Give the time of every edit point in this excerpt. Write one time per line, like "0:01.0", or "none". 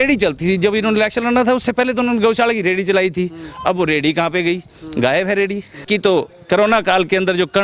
0:05.8